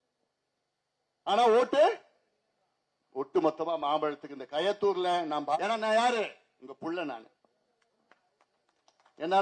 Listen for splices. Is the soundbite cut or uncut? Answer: cut